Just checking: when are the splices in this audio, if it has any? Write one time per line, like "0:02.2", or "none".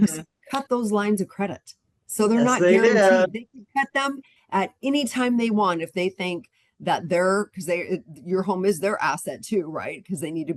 none